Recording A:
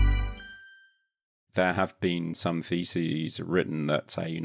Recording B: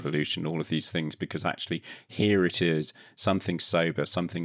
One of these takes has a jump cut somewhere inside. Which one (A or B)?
A